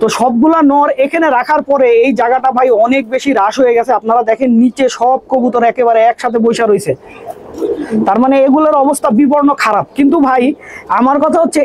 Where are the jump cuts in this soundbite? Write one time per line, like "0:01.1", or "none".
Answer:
none